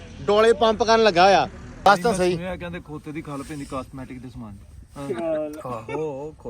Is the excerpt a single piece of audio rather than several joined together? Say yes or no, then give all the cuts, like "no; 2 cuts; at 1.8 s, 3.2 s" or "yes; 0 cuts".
no; 1 cut; at 1.9 s